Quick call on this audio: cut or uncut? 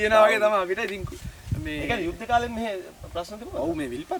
uncut